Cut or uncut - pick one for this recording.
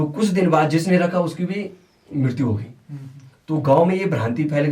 uncut